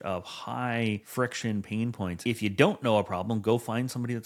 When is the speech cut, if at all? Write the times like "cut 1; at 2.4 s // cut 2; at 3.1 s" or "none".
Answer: cut 1; at 1.1 s // cut 2; at 2.2 s

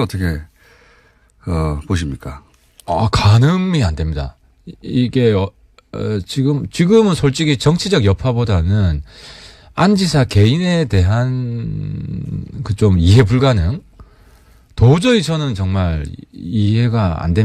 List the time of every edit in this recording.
cut 1; at 14.9 s

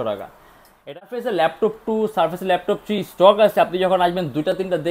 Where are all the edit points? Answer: cut 1; at 1.1 s

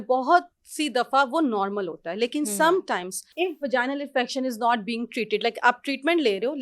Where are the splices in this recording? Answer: cut 1; at 3.2 s

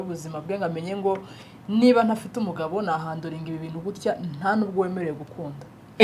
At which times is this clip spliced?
none

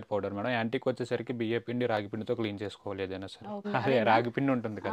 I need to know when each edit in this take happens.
cut 1; at 3.7 s

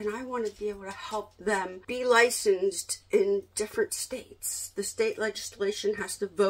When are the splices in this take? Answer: cut 1; at 1.8 s

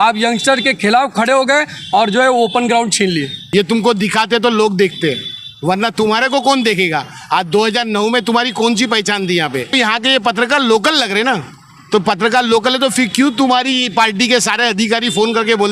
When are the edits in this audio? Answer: cut 1; at 3.4 s // cut 2; at 9.7 s

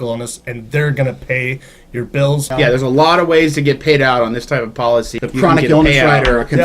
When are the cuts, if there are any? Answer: cut 1; at 2.5 s // cut 2; at 5.2 s

